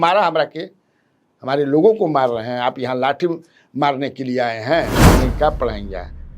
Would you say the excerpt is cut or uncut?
cut